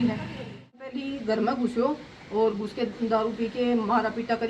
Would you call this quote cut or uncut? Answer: cut